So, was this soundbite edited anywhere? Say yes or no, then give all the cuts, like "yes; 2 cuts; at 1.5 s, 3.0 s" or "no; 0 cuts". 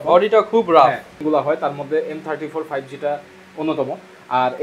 yes; 1 cut; at 1.1 s